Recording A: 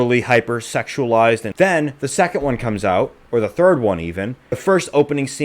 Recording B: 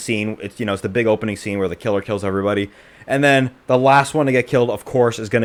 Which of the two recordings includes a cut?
A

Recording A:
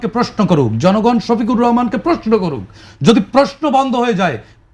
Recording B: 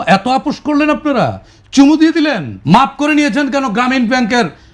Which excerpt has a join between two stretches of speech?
B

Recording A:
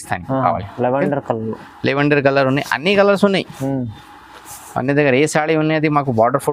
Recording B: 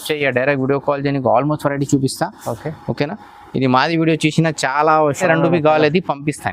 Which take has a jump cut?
B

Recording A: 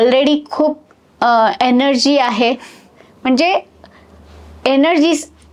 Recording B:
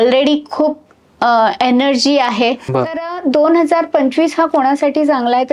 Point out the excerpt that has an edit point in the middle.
B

